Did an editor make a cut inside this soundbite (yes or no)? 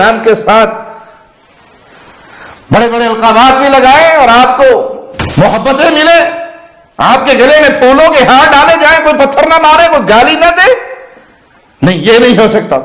no